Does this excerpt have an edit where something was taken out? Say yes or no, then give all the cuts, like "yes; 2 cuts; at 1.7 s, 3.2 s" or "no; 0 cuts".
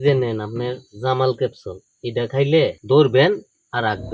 yes; 1 cut; at 2.8 s